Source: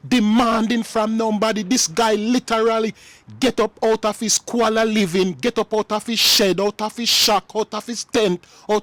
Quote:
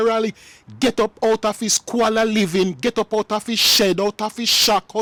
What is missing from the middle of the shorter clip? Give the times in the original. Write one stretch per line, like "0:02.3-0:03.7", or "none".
none